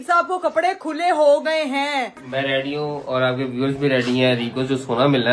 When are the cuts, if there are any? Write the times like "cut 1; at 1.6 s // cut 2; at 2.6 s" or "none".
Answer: cut 1; at 2.2 s